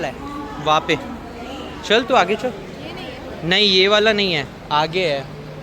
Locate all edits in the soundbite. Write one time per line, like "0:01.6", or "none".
none